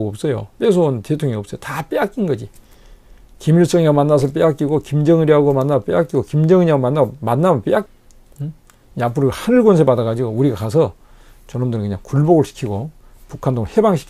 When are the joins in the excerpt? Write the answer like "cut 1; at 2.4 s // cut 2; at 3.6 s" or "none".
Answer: cut 1; at 7.9 s

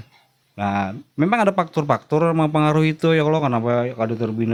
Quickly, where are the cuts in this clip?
none

